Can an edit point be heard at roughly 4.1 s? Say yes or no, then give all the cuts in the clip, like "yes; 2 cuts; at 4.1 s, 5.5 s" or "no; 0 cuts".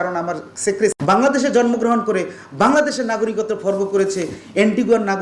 no; 1 cut; at 1.0 s